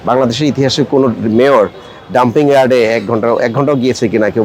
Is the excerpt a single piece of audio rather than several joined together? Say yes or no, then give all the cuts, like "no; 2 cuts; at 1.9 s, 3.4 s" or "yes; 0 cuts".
yes; 0 cuts